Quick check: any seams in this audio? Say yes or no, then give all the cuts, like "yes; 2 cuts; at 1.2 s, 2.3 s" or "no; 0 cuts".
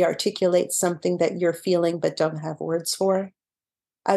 no; 0 cuts